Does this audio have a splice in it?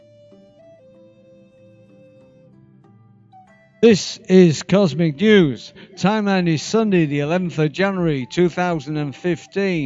yes; 1 cut; at 4.2 s

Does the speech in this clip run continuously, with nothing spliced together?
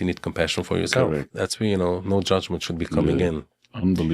no; 1 cut; at 1.3 s

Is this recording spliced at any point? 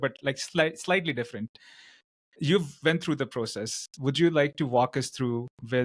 no; 0 cuts

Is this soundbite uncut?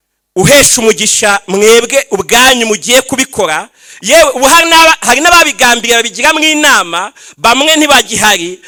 yes; 0 cuts

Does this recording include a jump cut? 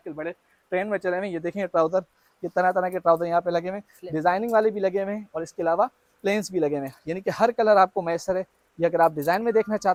no; 0 cuts

